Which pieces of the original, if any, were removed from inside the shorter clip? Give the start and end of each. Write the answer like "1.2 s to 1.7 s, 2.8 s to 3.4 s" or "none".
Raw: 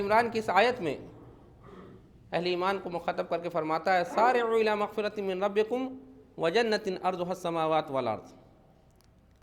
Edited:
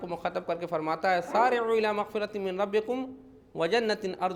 none